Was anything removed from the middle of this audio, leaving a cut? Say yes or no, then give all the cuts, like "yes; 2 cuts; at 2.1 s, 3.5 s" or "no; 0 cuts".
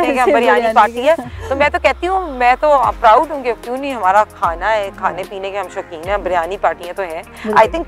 no; 0 cuts